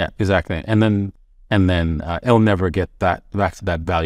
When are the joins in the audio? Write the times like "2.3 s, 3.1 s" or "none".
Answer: 1.2 s